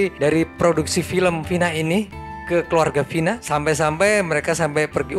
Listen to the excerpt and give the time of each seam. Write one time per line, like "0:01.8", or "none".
none